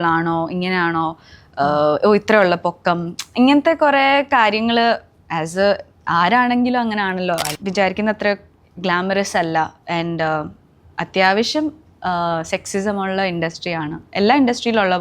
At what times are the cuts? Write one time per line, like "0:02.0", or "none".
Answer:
0:07.5